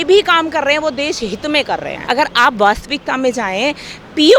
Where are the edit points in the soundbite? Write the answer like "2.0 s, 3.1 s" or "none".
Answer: 1.9 s